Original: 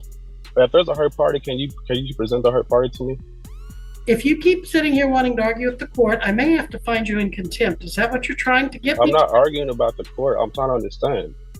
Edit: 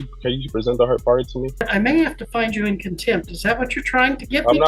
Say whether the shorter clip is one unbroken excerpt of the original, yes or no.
no